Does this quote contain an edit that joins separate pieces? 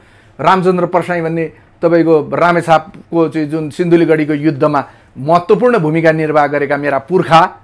no; 0 cuts

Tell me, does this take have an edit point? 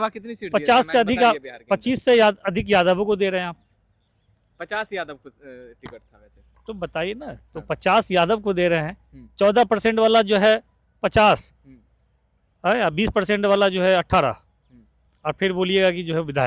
no; 0 cuts

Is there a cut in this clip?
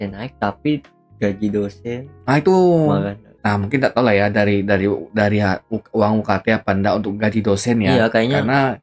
yes; 1 cut; at 3.2 s

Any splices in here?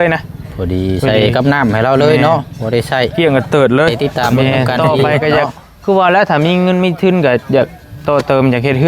yes; 1 cut; at 3.9 s

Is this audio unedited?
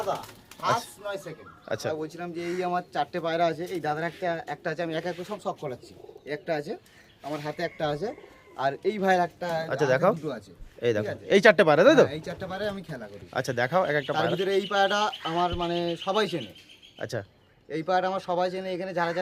no; 1 cut; at 1.9 s

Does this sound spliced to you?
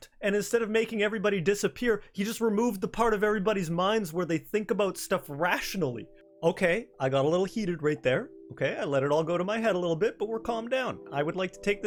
no; 0 cuts

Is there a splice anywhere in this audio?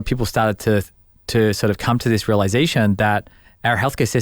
no; 0 cuts

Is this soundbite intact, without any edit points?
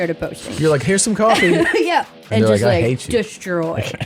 yes; 0 cuts

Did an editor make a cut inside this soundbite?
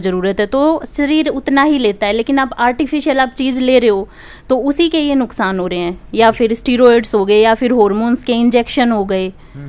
no; 0 cuts

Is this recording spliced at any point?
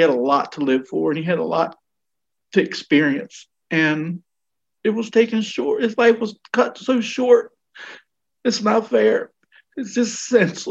yes; 1 cut; at 9.4 s

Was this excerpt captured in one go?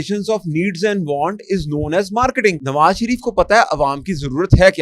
no; 1 cut; at 2.6 s

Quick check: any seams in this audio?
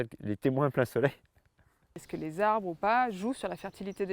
yes; 1 cut; at 2.1 s

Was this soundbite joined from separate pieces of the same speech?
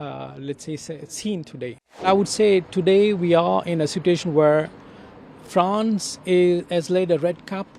yes; 1 cut; at 2.1 s

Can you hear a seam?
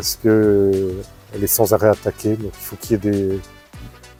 no; 0 cuts

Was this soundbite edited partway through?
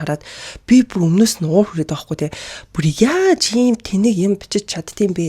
no; 0 cuts

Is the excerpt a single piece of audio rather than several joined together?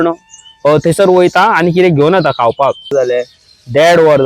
no; 1 cut; at 2.9 s

